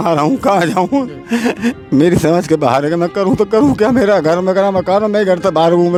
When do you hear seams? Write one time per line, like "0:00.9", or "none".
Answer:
none